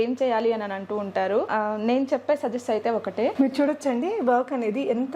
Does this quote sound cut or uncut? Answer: cut